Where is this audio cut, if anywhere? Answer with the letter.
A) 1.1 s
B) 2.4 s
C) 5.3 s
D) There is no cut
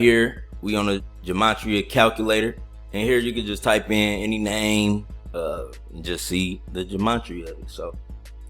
A